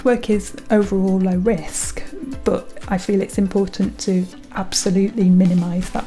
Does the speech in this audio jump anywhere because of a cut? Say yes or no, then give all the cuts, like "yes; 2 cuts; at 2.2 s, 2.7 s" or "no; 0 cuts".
no; 0 cuts